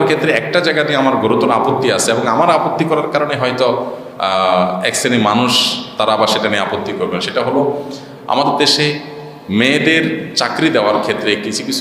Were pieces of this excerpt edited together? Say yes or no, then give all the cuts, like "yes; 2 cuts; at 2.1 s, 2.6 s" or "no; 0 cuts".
no; 0 cuts